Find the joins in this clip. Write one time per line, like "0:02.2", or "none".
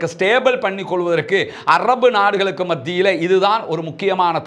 none